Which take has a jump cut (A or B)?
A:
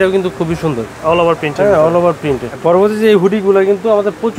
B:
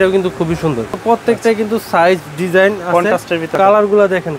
B